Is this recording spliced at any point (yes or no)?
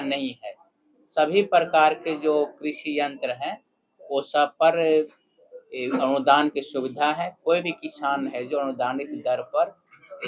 no